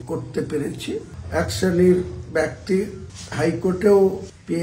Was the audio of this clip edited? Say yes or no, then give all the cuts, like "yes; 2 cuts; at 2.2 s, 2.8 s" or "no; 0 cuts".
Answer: yes; 1 cut; at 1.2 s